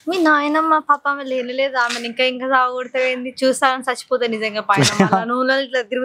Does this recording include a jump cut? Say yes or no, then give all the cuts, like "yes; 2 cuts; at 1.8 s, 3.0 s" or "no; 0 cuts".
no; 0 cuts